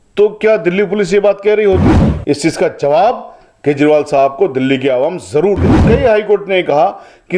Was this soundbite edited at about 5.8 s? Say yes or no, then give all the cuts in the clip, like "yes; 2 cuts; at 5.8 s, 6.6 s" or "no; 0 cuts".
yes; 2 cuts; at 2.1 s, 5.8 s